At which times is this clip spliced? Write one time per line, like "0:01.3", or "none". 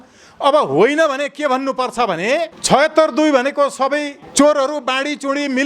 0:02.6
0:04.2